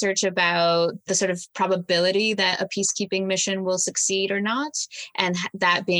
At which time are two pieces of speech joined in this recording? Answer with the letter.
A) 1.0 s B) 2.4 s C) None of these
A